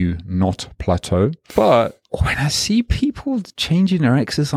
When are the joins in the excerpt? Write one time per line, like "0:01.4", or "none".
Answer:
0:01.4
0:02.0
0:03.5